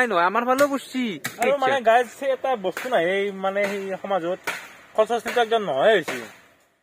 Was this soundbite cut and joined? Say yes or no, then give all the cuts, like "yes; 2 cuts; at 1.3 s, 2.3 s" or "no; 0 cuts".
yes; 1 cut; at 1.3 s